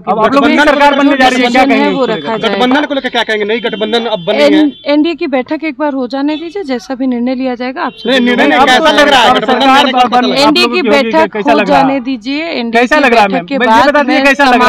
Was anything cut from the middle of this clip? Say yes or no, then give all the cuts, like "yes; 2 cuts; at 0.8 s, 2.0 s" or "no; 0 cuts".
no; 0 cuts